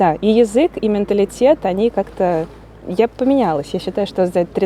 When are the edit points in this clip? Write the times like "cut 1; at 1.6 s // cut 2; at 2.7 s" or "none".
none